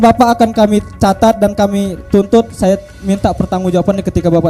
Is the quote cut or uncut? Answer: uncut